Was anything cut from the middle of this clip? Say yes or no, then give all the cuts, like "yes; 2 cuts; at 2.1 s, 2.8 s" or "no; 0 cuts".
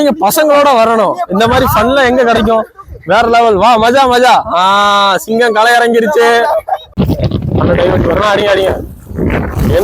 yes; 1 cut; at 6.9 s